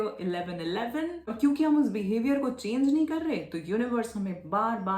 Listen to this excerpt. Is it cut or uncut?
cut